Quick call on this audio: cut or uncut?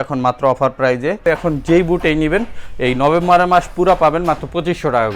cut